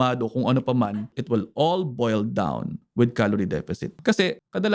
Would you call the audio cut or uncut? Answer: cut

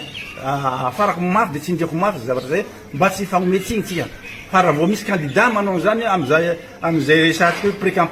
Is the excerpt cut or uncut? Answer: uncut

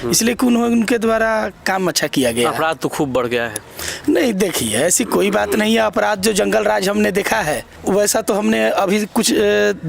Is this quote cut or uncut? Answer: cut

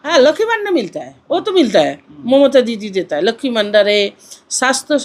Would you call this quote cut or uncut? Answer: uncut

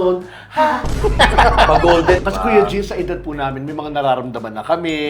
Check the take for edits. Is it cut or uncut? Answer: cut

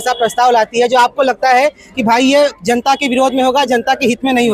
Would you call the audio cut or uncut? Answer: uncut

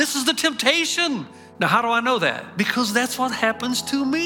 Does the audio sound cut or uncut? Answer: cut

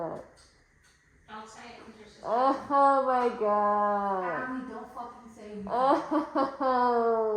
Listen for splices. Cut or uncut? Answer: uncut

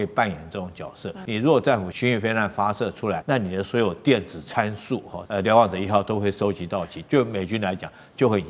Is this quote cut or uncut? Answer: cut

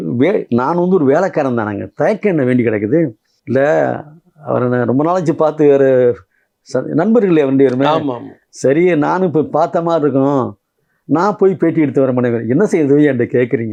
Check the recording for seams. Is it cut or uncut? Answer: uncut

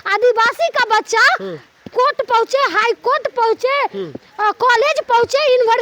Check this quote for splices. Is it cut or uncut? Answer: uncut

